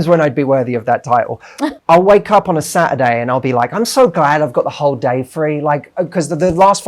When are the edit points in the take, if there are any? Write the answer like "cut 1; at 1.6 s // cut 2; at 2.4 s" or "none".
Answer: cut 1; at 1.8 s